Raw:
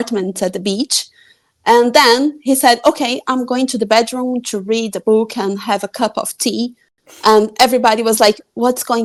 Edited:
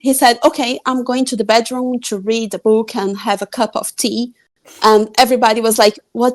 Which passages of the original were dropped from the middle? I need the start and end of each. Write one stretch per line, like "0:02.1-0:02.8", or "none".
none